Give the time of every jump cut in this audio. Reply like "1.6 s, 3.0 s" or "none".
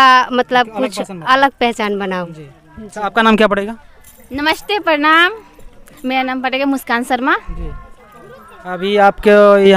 none